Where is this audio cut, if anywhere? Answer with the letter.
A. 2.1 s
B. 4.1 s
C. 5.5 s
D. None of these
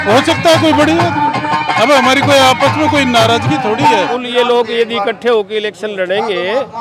B